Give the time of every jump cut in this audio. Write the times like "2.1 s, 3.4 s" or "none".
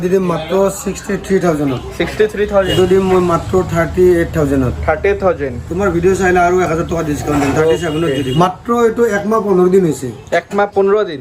2.7 s, 8.2 s

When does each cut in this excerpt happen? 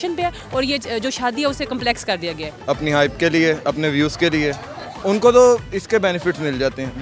2.5 s

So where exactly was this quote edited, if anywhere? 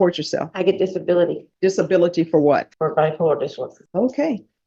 1.4 s, 2.7 s, 3.8 s

